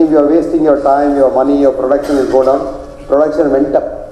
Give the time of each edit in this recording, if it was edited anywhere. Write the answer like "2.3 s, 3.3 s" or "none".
none